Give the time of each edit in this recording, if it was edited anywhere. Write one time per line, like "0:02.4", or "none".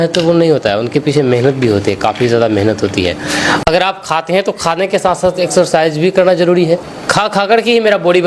0:03.6
0:06.9